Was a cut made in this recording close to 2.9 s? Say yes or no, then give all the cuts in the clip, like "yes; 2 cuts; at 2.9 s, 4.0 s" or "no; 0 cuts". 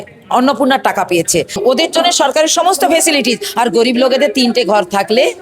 no; 1 cut; at 1.6 s